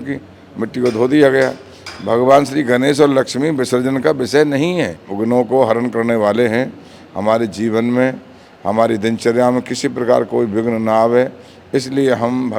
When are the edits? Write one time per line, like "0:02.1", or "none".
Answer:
0:05.0

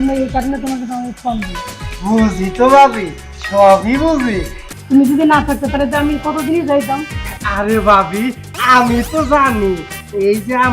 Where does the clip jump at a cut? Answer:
0:04.7

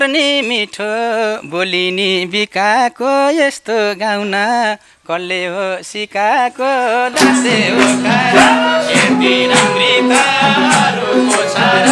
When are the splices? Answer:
none

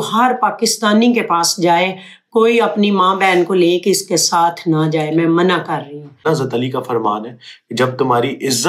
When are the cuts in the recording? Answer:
0:06.2

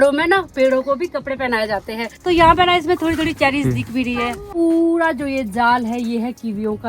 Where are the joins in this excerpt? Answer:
0:02.1
0:04.5

